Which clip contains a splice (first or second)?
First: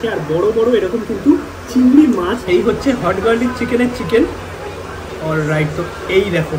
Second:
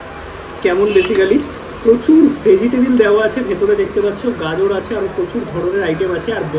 first